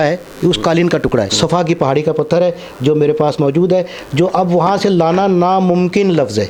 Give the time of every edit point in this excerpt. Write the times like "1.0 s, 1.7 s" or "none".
none

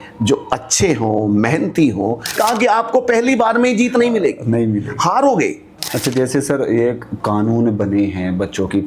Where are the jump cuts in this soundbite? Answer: 2.4 s, 5.9 s

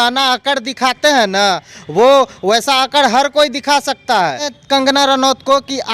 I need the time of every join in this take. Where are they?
4.5 s

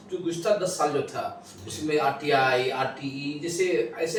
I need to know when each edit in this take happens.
none

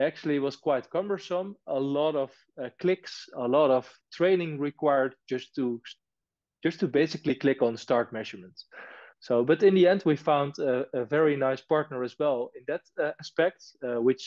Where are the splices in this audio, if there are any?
none

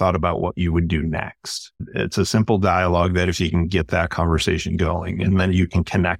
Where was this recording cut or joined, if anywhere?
1.9 s

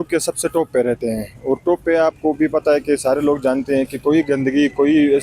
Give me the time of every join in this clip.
none

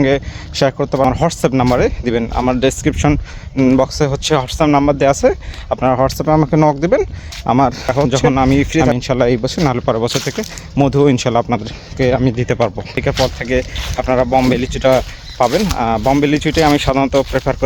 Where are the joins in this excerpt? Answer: 1.0 s, 8.9 s, 13.0 s

